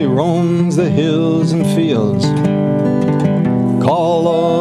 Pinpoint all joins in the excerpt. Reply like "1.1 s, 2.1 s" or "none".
1.0 s